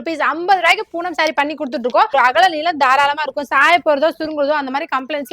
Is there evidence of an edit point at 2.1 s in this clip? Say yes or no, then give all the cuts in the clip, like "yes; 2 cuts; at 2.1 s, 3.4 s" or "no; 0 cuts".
yes; 1 cut; at 2.1 s